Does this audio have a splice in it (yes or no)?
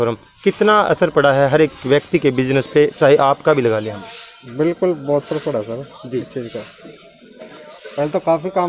no